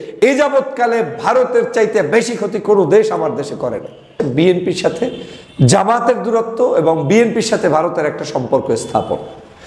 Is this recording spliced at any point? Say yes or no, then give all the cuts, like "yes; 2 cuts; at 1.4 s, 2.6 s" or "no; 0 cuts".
yes; 1 cut; at 4.2 s